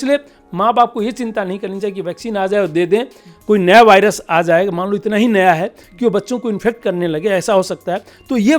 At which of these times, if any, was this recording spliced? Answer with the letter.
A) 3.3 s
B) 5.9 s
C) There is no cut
A